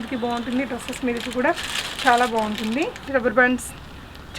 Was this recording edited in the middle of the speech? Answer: yes; 1 cut; at 3.1 s

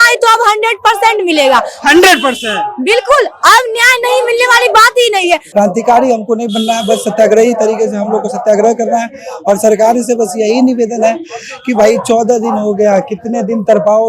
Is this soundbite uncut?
no; 1 cut; at 5.5 s

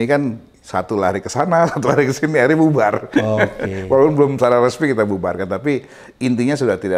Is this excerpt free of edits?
yes; 0 cuts

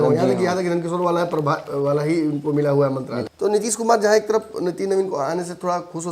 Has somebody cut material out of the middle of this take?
yes; 1 cut; at 3.1 s

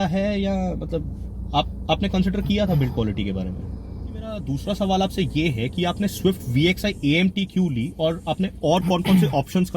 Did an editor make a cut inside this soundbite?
yes; 1 cut; at 4.4 s

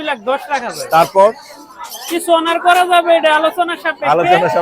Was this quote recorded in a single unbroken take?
yes; 0 cuts

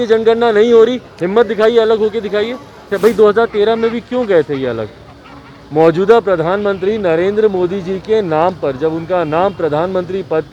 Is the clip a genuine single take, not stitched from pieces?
no; 1 cut; at 2.9 s

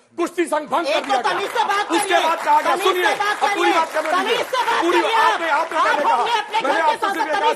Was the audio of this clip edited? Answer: no; 0 cuts

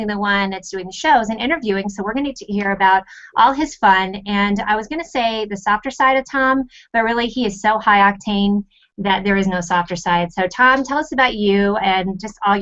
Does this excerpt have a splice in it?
yes; 1 cut; at 9.2 s

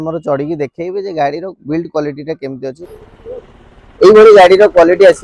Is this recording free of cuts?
no; 1 cut; at 2.8 s

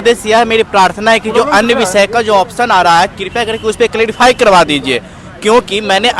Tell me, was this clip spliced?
no; 0 cuts

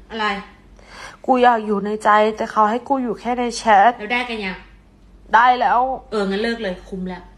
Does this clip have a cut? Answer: no; 0 cuts

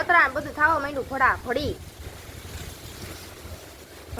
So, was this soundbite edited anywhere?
no; 0 cuts

